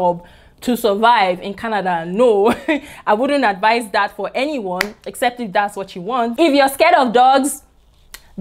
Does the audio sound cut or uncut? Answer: cut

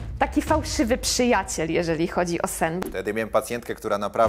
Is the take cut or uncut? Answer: cut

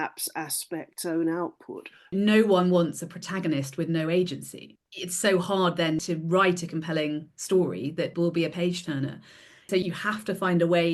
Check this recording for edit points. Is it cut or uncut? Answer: cut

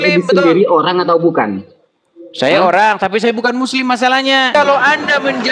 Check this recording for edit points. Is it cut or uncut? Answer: cut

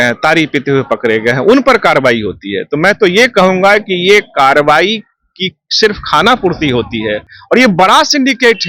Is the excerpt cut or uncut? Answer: uncut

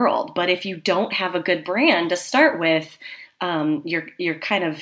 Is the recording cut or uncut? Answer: uncut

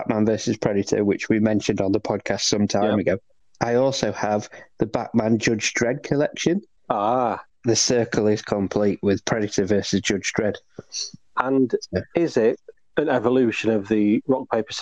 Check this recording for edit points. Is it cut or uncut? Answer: uncut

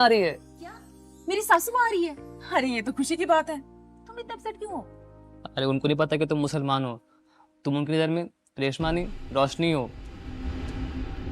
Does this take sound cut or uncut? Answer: uncut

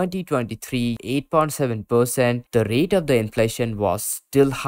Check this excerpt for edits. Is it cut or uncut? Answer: cut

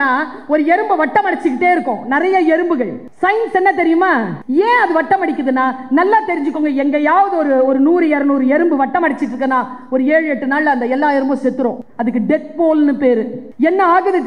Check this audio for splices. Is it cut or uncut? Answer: cut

